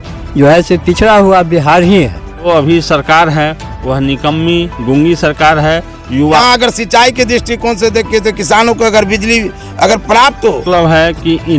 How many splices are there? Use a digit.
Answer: 3